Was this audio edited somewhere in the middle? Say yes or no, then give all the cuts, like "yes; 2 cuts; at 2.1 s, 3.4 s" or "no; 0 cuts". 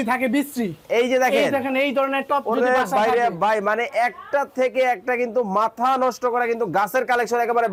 no; 0 cuts